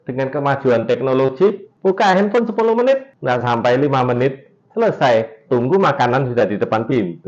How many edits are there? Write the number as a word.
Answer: two